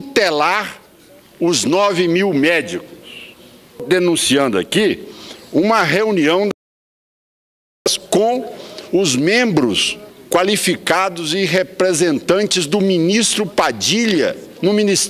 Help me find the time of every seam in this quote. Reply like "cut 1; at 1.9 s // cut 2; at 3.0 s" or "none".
cut 1; at 3.8 s